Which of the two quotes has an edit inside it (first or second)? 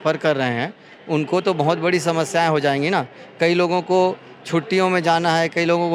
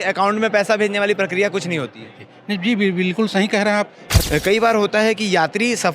second